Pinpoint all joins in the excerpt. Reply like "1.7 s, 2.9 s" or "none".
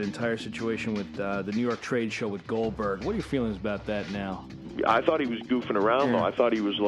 4.6 s